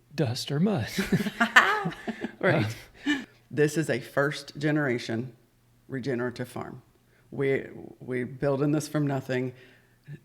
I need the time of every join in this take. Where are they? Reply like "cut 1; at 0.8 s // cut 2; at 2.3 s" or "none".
cut 1; at 3.2 s